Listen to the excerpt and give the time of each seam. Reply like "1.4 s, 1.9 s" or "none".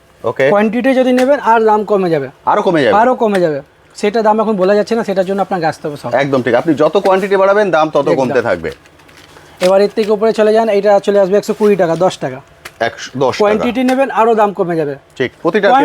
none